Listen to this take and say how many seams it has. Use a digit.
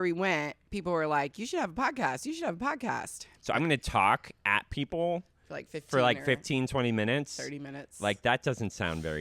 1